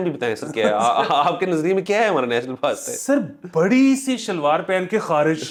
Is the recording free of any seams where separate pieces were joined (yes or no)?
yes